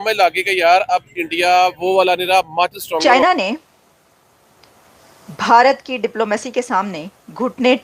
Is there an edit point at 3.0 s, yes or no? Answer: yes